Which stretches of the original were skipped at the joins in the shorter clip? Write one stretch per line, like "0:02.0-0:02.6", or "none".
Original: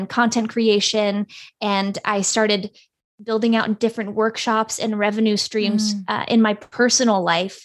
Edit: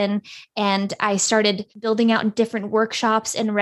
0:02.7-0:03.1